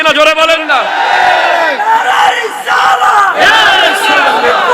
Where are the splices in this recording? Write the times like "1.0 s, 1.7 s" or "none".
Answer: none